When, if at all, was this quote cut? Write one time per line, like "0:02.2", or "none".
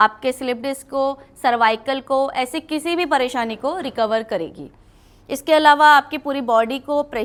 none